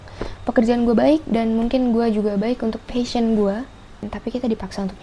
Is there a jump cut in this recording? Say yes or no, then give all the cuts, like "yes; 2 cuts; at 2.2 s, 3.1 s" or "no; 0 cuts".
yes; 1 cut; at 4.1 s